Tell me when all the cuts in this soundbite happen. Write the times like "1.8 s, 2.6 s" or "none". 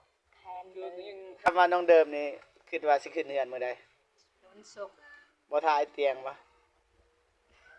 1.4 s